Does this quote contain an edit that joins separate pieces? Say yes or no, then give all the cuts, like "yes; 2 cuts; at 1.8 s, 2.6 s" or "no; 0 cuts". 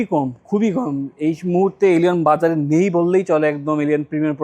no; 0 cuts